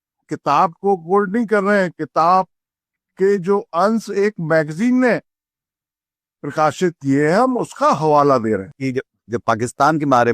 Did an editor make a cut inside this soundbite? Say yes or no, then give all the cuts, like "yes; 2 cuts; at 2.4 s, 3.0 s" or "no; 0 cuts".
yes; 1 cut; at 8.8 s